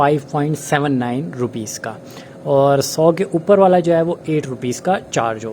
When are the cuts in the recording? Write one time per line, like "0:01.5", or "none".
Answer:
none